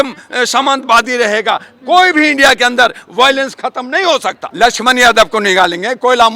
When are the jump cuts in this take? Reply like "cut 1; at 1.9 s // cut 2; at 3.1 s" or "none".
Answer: cut 1; at 4.4 s